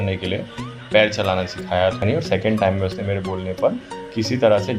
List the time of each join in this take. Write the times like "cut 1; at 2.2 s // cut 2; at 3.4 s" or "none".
cut 1; at 2.0 s